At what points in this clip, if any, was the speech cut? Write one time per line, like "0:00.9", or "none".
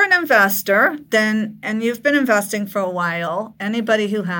none